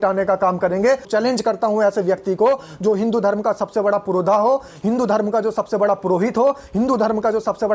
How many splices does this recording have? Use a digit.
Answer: 1